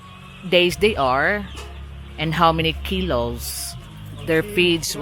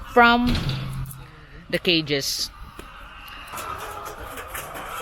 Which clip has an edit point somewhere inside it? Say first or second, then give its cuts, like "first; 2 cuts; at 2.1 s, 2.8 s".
second; 1 cut; at 3.5 s